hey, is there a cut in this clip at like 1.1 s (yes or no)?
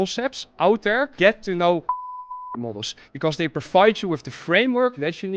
yes